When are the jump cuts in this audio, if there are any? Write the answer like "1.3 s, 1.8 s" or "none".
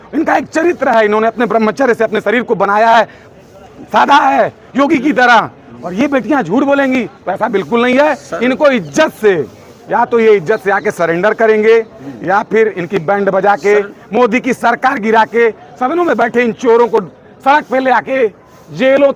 none